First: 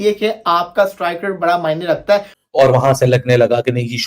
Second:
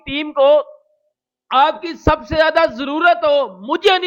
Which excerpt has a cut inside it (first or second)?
first